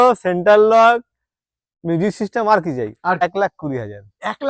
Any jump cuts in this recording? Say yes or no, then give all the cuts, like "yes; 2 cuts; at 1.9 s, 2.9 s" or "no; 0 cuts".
yes; 1 cut; at 3.2 s